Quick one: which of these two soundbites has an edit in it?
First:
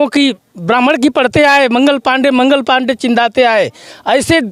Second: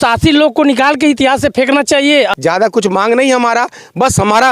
second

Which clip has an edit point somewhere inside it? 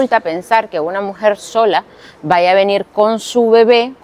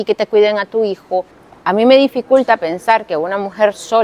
second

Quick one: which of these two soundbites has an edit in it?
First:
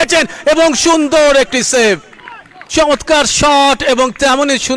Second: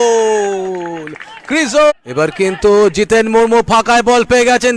second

